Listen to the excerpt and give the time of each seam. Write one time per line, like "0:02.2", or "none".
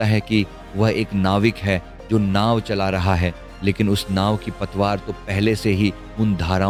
none